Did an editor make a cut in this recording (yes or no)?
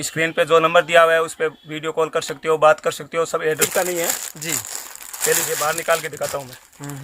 yes